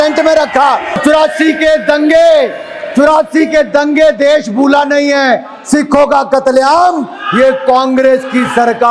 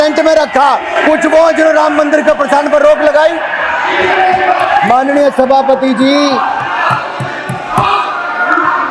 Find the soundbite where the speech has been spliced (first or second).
first